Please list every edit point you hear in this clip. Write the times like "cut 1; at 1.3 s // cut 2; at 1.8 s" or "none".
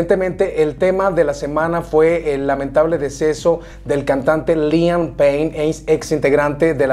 none